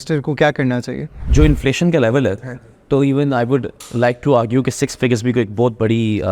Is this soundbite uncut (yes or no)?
no